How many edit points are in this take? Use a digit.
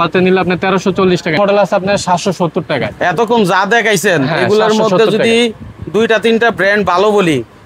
1